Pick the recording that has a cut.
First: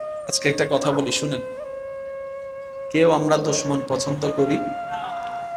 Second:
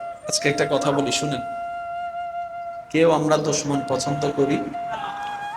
second; 2 cuts; at 1.3 s, 2.9 s

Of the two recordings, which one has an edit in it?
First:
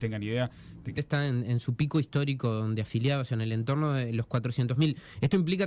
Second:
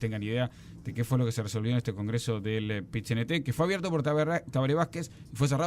second; 1 cut; at 0.9 s

